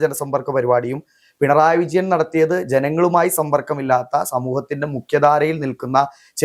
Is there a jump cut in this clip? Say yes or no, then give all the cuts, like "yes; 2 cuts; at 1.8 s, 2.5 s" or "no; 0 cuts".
no; 0 cuts